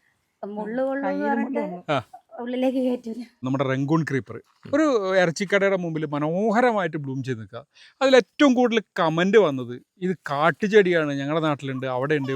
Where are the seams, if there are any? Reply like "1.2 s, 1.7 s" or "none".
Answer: 3.4 s